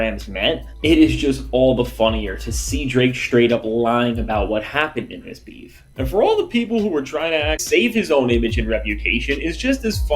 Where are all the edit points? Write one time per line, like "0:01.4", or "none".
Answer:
0:07.6